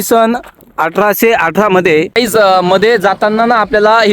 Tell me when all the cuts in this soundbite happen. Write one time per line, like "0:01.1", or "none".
0:02.1